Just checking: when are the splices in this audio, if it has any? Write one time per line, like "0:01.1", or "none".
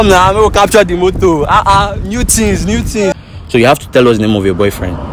0:03.2